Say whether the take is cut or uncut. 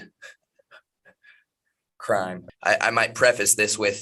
cut